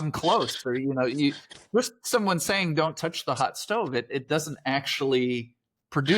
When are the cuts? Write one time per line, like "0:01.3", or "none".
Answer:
0:01.5